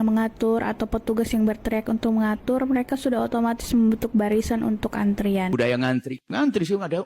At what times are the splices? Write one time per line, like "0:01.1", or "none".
0:05.5